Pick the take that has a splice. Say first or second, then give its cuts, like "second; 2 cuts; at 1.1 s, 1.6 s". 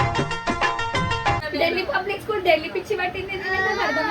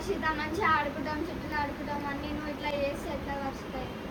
first; 1 cut; at 1.4 s